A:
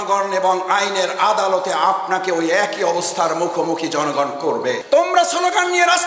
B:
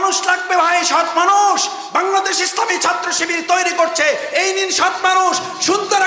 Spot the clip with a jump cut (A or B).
A